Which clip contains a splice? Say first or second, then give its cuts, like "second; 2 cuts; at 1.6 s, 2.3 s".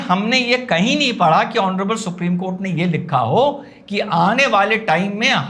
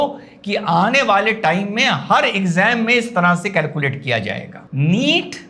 second; 1 cut; at 4.6 s